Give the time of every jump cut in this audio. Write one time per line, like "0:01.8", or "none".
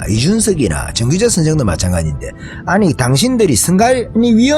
none